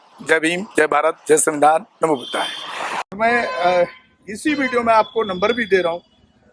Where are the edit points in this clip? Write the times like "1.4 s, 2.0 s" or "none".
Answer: 3.2 s